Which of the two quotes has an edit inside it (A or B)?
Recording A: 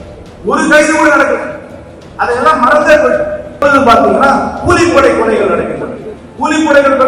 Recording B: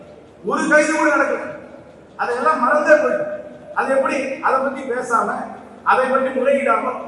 A